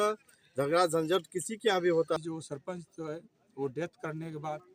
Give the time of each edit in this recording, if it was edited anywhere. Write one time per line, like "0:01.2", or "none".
0:02.2